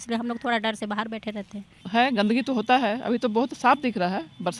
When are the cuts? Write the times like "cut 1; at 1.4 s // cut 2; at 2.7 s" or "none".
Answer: cut 1; at 1.7 s